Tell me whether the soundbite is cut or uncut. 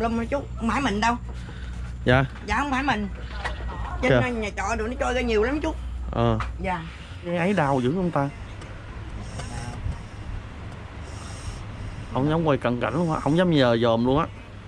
cut